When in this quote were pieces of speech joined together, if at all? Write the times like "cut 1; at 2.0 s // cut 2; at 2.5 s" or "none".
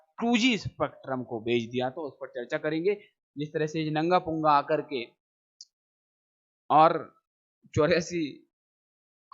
cut 1; at 3.1 s